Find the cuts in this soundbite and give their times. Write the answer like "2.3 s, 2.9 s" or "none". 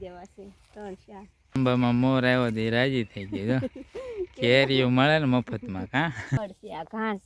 1.6 s, 6.4 s